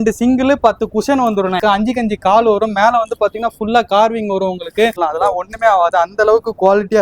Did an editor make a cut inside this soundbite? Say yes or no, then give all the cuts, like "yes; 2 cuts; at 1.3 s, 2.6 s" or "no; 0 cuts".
yes; 2 cuts; at 1.6 s, 4.9 s